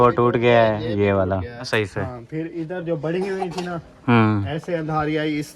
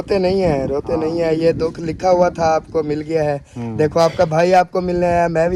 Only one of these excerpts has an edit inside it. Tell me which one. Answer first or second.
first